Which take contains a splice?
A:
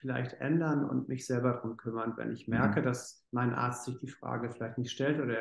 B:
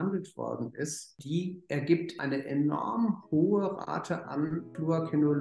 A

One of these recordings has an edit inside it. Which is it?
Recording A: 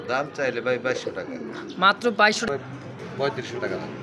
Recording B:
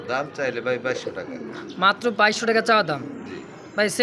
A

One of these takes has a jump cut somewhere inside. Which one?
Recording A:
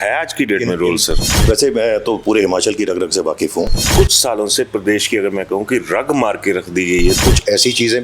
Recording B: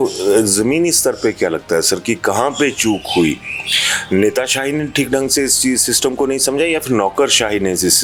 A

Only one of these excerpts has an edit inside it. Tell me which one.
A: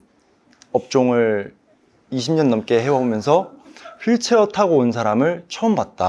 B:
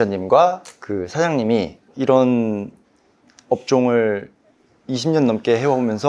B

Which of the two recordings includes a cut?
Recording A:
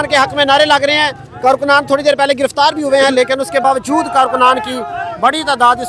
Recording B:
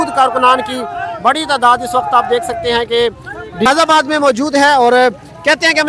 B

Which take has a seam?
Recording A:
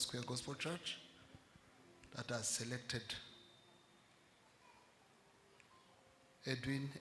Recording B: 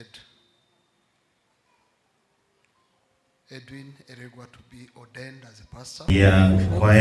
B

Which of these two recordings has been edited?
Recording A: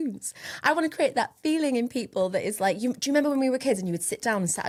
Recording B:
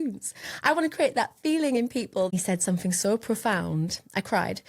B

